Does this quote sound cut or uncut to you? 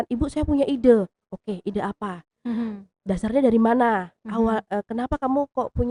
uncut